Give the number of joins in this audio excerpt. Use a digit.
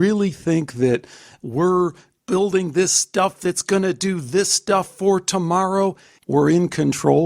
1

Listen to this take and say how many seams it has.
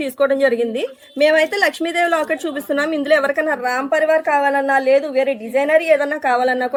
0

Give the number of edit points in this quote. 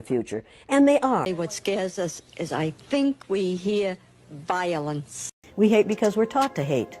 2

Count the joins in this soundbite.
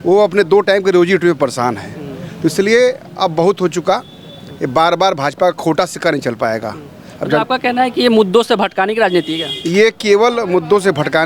0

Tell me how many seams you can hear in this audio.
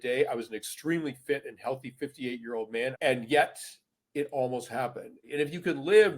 2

